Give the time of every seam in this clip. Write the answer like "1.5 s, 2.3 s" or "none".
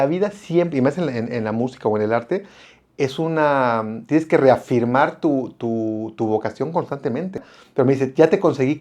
7.5 s